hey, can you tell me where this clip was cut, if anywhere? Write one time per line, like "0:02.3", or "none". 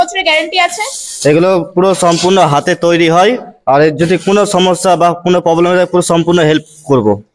none